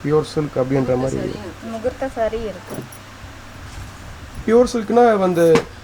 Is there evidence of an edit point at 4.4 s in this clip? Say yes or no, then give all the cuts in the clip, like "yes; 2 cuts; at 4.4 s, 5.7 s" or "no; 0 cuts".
yes; 1 cut; at 4.4 s